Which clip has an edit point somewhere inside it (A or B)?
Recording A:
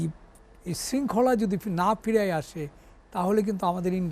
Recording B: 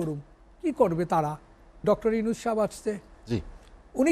B